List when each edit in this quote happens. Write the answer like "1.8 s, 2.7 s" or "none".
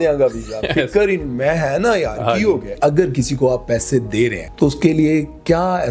2.7 s, 4.4 s